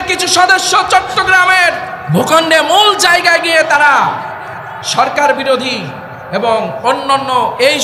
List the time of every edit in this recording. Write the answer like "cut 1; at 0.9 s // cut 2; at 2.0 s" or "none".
cut 1; at 1.9 s